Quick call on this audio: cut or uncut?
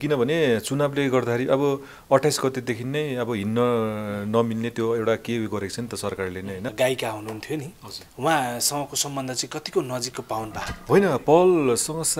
cut